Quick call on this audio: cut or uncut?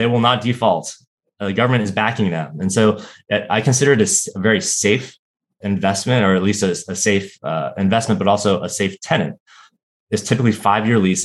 uncut